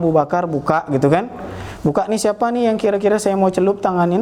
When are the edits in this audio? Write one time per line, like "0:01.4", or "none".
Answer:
none